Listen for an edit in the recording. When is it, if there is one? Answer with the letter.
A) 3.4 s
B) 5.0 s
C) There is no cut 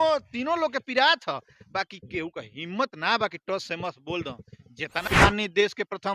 B